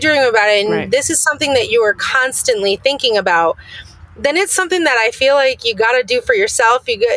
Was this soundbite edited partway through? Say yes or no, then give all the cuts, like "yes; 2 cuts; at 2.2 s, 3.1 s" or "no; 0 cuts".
no; 0 cuts